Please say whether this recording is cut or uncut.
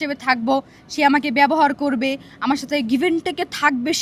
uncut